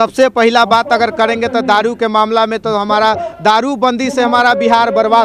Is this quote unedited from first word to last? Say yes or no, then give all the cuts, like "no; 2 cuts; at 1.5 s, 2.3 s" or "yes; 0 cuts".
yes; 0 cuts